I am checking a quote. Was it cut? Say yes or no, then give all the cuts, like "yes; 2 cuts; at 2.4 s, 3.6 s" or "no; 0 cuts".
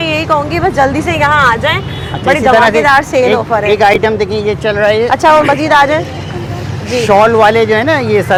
no; 0 cuts